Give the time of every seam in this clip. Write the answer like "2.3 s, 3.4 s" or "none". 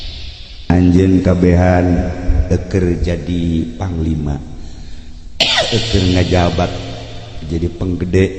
none

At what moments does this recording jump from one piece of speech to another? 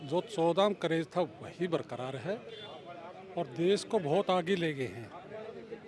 none

